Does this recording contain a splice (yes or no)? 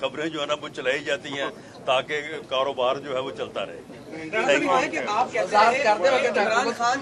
no